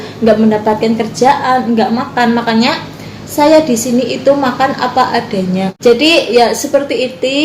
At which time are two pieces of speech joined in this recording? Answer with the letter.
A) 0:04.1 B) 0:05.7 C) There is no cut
B